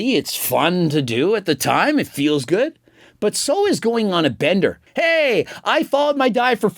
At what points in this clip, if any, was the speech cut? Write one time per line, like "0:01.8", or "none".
0:04.8